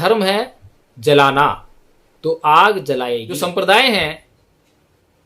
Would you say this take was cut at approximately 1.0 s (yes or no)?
no